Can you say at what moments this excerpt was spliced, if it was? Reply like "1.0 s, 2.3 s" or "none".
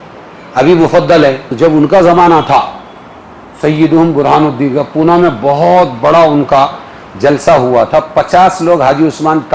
1.5 s